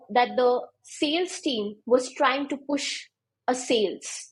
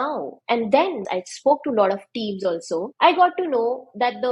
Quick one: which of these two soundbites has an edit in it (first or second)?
second